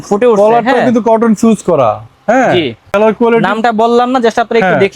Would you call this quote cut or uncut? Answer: cut